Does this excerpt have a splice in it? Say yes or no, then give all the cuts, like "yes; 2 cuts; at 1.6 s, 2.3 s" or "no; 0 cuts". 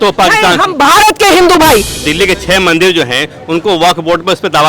yes; 1 cut; at 2.0 s